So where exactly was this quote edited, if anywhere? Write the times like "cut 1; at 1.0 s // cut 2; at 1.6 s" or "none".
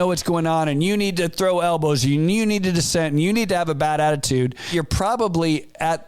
cut 1; at 4.7 s

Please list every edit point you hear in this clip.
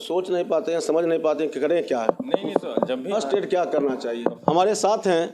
cut 1; at 4.4 s

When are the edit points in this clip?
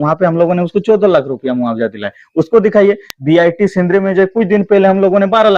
none

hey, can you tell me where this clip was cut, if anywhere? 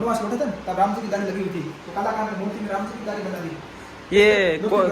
none

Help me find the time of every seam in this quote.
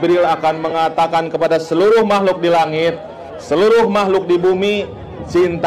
none

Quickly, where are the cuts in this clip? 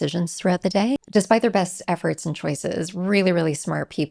cut 1; at 1.0 s

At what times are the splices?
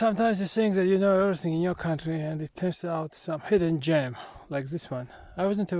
none

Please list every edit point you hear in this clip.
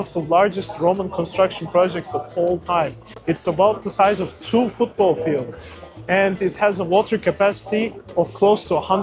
none

